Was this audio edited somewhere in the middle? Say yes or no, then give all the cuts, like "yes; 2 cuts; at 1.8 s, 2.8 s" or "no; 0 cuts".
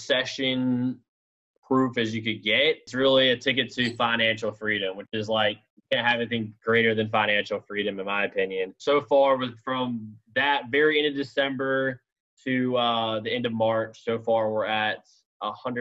yes; 2 cuts; at 2.9 s, 8.8 s